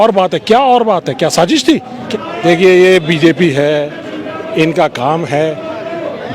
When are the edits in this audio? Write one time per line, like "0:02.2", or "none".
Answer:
0:02.0